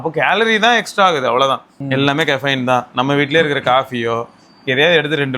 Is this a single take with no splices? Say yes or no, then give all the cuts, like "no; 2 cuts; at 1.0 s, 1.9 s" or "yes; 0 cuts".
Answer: no; 1 cut; at 1.8 s